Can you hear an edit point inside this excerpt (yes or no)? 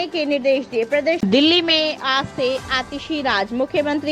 yes